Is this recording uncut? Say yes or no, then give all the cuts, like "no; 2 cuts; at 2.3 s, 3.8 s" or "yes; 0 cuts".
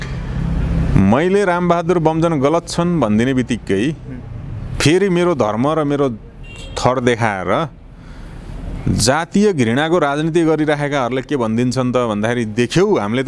yes; 0 cuts